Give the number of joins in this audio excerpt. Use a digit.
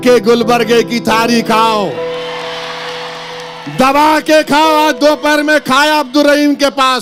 0